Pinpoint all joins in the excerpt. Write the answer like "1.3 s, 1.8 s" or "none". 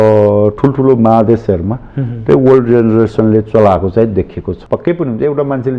4.5 s